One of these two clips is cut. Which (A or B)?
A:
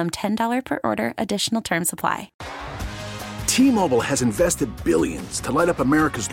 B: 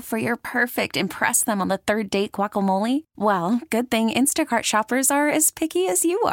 A